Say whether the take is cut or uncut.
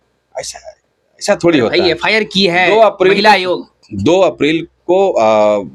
uncut